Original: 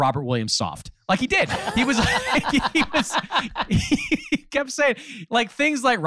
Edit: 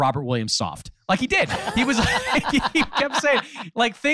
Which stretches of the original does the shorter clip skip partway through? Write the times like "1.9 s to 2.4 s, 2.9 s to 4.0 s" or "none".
2.9 s to 4.5 s

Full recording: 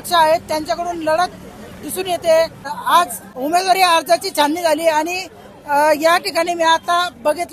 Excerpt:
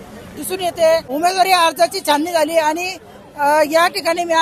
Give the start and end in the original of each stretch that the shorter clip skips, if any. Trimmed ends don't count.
2.5 s to 3.4 s

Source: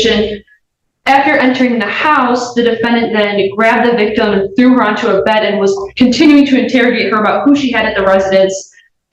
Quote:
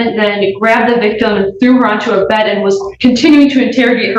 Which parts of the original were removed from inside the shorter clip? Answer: none

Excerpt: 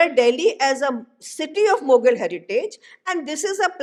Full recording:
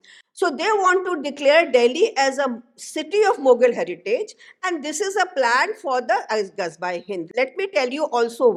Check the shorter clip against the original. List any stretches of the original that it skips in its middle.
none

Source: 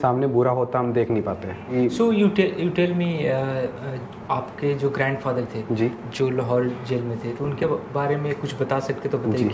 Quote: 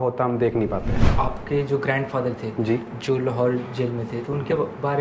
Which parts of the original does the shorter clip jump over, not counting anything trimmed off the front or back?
1.5 s to 4.1 s

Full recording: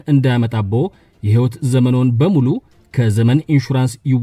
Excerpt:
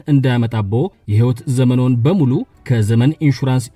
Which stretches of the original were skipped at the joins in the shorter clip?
1.0 s to 1.2 s, 2.7 s to 2.8 s

